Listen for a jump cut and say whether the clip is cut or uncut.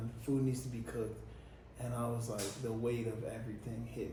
uncut